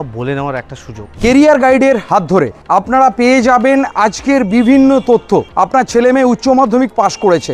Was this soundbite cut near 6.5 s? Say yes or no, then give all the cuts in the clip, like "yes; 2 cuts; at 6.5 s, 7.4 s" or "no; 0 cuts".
no; 2 cuts; at 1.1 s, 2.6 s